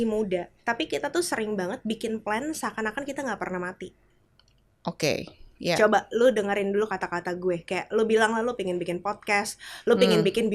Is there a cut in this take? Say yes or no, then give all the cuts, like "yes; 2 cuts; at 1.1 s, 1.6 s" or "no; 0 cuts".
no; 0 cuts